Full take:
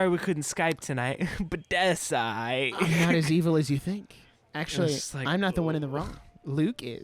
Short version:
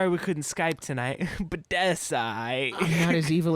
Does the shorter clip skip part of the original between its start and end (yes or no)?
no